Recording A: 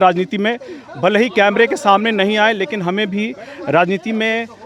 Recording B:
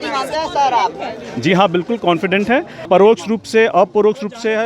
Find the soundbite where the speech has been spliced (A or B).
B